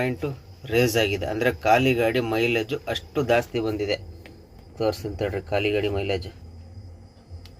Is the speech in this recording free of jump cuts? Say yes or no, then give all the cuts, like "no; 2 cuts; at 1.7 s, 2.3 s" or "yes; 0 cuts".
yes; 0 cuts